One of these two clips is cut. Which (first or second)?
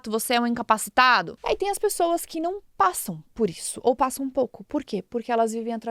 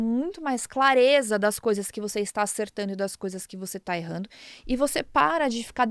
first